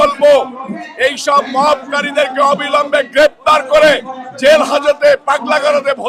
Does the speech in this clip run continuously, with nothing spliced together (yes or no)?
yes